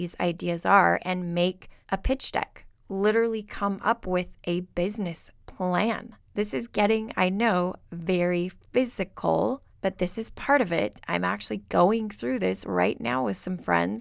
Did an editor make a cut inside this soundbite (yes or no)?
yes